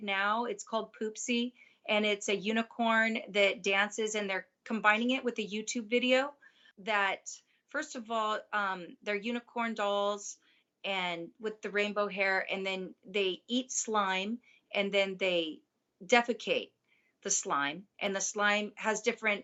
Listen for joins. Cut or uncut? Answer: uncut